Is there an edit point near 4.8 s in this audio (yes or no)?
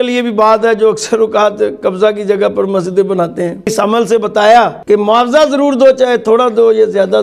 yes